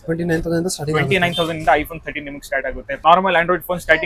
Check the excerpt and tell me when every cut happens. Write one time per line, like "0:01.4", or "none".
0:02.9